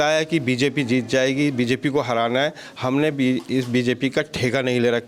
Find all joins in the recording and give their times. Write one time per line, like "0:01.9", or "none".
none